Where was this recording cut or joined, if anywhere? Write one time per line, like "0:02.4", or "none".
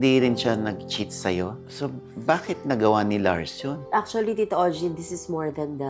0:03.8